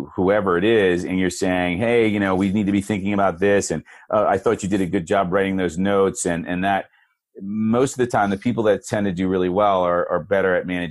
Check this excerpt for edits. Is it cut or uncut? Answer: uncut